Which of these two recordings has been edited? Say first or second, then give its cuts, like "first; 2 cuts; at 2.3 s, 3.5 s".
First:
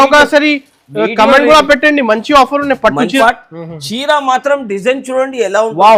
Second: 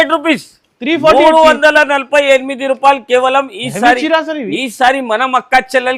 first; 1 cut; at 3.2 s